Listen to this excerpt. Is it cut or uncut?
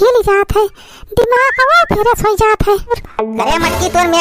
cut